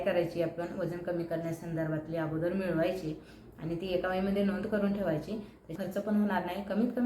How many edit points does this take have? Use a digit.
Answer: 1